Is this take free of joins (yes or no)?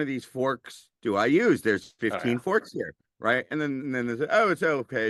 yes